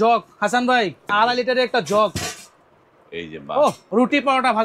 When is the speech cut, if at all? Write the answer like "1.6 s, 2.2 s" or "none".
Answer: 1.0 s, 3.8 s